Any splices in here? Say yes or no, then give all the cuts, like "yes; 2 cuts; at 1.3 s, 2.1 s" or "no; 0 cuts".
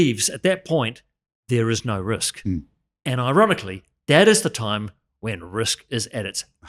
no; 0 cuts